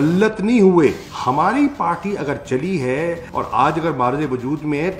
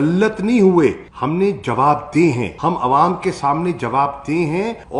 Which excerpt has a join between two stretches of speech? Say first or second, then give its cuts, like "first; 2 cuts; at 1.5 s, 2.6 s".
first; 1 cut; at 1.1 s